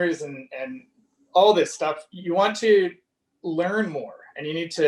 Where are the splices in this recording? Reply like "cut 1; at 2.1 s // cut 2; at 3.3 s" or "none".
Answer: none

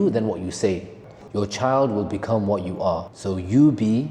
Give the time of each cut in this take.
cut 1; at 1.1 s

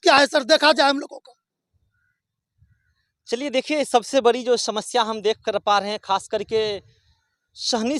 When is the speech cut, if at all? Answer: none

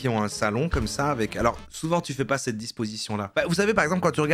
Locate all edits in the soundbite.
none

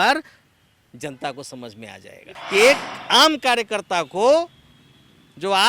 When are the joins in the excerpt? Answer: cut 1; at 2.3 s

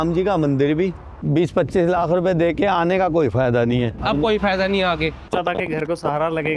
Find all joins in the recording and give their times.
cut 1; at 1.3 s // cut 2; at 4.0 s // cut 3; at 5.3 s

